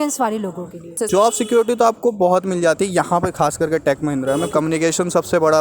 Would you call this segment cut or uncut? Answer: cut